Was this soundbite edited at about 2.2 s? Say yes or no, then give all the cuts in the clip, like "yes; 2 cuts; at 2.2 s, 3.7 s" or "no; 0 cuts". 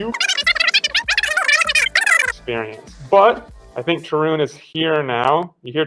yes; 1 cut; at 2.2 s